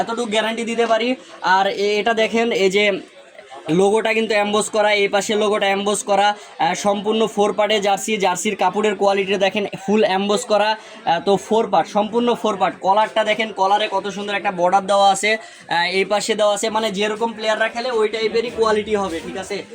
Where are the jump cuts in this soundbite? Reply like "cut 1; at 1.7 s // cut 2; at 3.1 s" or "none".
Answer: none